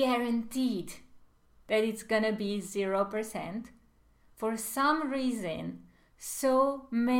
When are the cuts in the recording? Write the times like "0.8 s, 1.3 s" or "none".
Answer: none